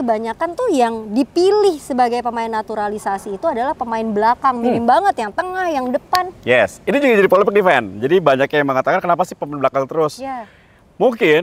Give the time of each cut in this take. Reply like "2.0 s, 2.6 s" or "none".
none